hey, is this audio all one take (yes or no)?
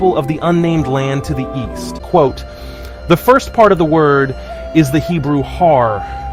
no